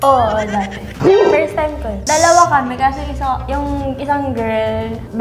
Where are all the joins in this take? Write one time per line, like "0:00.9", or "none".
0:00.9
0:02.0

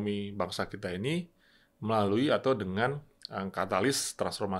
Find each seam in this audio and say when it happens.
none

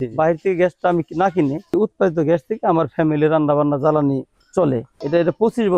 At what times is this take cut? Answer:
0:01.7
0:04.6

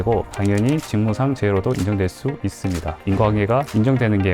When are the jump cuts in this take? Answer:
0:03.0

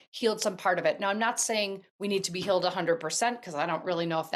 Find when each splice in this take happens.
none

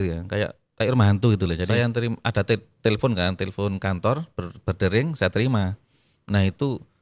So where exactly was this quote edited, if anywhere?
0:01.7

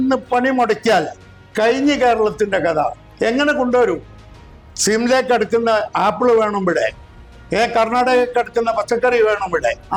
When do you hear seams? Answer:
none

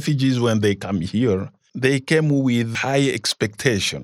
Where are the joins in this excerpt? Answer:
0:01.7
0:02.7

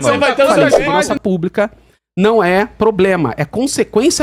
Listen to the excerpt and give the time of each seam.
0:01.1

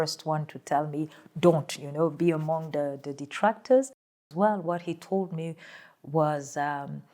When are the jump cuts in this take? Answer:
0:04.1

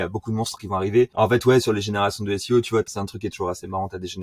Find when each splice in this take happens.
0:01.1
0:02.9

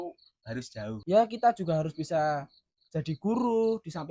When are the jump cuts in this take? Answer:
0:01.0

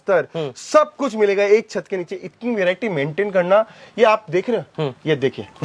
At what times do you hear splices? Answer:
none

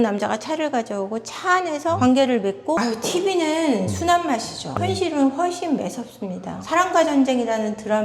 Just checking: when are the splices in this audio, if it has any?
0:02.8
0:04.8

